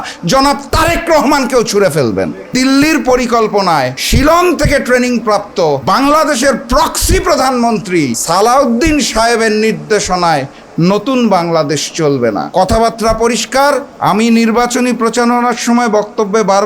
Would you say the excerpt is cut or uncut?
cut